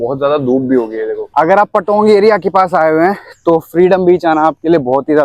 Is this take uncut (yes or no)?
no